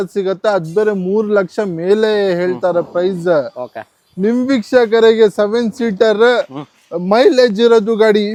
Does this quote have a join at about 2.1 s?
no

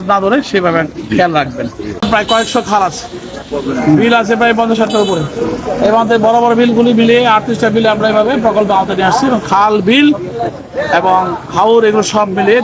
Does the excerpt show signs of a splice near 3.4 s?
no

